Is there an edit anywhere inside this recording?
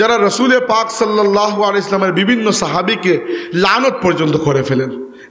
no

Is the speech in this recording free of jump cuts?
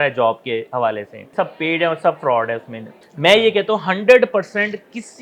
no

